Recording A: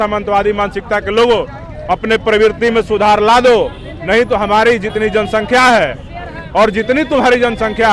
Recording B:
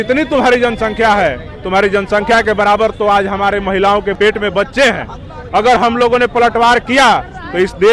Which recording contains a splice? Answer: B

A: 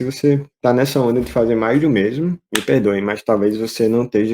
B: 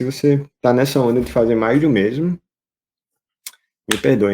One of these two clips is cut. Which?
A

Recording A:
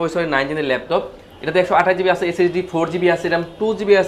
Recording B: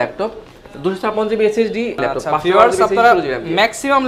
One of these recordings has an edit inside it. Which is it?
B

